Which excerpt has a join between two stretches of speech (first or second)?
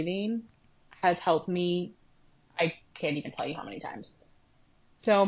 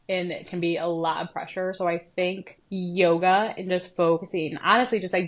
second